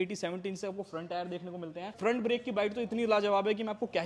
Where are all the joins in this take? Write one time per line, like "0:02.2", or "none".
0:01.9